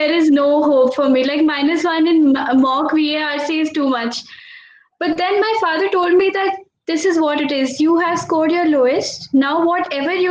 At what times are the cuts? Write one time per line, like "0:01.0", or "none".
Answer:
none